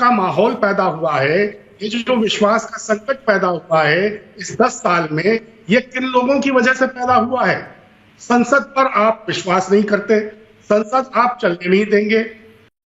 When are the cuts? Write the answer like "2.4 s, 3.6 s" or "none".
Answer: none